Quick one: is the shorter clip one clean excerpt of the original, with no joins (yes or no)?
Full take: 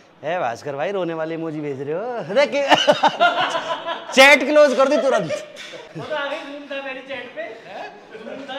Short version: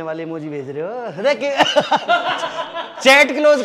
yes